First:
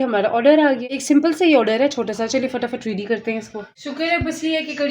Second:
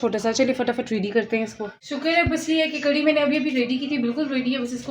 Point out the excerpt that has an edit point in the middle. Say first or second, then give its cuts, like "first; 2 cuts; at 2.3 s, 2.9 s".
first; 1 cut; at 0.9 s